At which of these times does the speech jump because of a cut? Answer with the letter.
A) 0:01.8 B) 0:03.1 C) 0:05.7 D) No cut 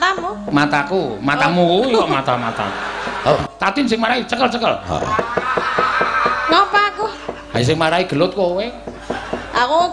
B